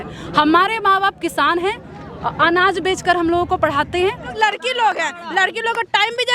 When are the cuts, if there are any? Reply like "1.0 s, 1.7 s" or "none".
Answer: 4.3 s